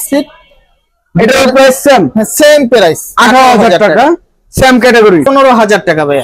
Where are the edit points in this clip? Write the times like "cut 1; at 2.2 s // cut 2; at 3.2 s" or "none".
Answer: cut 1; at 5.3 s